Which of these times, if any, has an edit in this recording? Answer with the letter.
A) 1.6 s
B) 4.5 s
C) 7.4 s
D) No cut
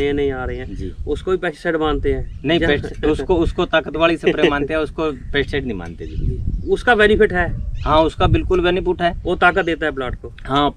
D